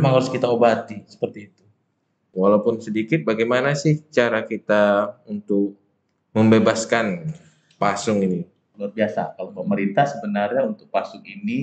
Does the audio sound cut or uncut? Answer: cut